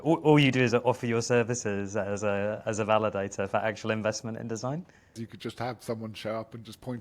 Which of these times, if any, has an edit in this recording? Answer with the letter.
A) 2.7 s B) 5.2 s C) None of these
B